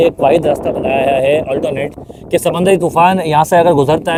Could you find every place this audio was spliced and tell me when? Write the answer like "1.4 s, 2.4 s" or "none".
none

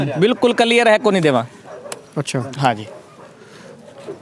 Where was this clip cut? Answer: none

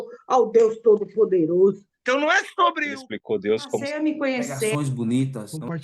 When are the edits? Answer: 1.9 s

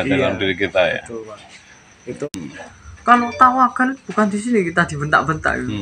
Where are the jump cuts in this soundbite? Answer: 2.2 s

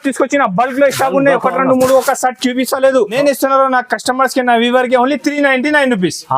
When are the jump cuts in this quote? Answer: 3.1 s

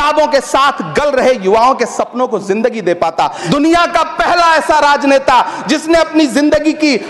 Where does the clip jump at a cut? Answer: 3.4 s

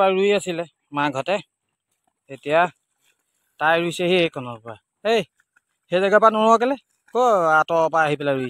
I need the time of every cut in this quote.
none

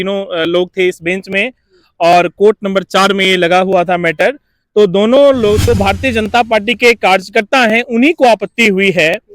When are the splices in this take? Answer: 5.6 s

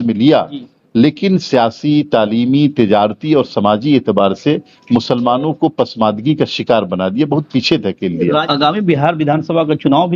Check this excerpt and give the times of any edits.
8.4 s

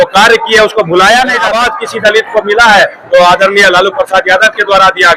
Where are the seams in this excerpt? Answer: 1.5 s

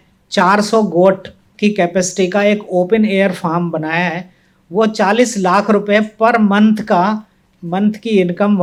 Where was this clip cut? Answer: none

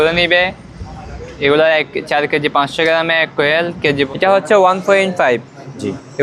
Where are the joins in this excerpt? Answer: 4.1 s

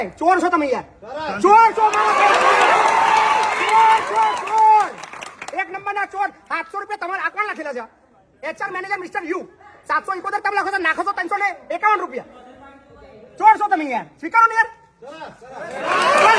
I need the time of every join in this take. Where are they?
none

